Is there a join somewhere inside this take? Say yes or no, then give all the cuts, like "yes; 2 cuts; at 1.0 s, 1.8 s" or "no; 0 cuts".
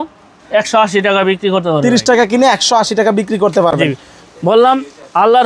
no; 0 cuts